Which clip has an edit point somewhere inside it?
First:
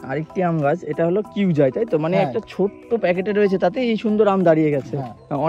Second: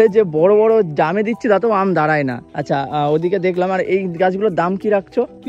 second; 1 cut; at 2.5 s

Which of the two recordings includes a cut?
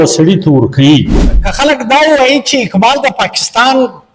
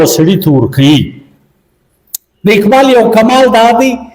first; 1 cut; at 1.4 s

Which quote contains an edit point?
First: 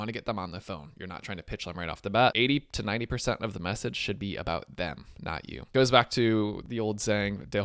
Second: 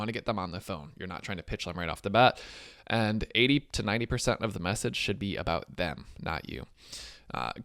first; 3 cuts; at 2.3 s, 5.7 s, 6.6 s

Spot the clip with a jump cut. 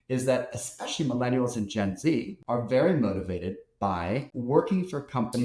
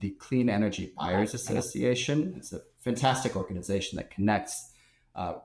first; 2 cuts; at 2.4 s, 4.3 s

